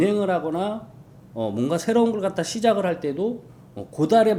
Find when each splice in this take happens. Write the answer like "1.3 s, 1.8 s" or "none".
none